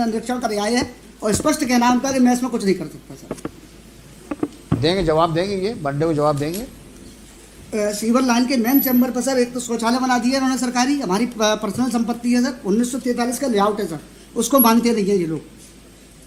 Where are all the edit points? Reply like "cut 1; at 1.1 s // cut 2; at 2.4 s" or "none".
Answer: none